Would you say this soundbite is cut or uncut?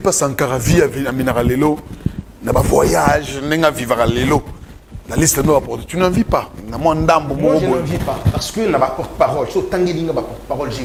uncut